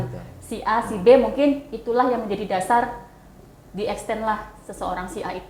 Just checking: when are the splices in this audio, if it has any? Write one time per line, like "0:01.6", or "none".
none